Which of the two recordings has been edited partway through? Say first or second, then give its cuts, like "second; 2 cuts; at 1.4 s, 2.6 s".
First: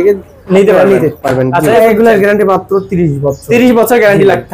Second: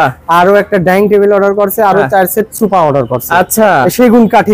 first; 1 cut; at 1.8 s